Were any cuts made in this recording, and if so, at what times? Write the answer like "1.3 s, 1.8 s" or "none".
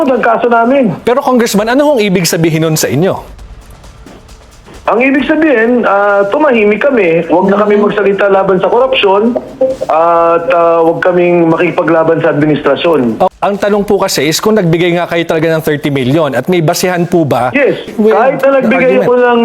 13.3 s, 17.9 s